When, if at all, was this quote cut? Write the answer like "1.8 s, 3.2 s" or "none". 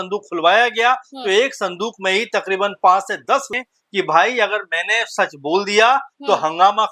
3.5 s